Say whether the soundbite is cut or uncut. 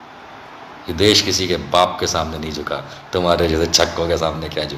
uncut